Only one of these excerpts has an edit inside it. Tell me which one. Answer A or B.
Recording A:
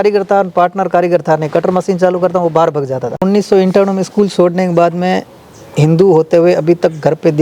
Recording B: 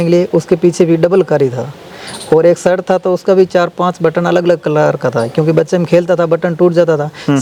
A